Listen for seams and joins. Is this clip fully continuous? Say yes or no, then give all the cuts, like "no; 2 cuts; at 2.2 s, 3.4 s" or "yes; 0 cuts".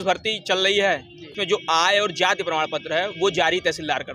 no; 1 cut; at 1.3 s